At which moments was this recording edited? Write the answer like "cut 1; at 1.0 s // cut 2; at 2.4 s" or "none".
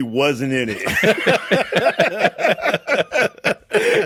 none